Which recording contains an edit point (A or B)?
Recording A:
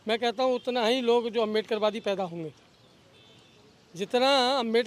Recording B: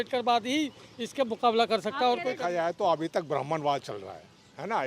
B